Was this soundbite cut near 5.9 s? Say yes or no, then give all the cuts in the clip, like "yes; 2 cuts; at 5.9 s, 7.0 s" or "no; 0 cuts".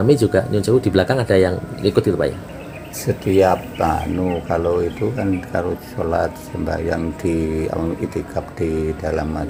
no; 0 cuts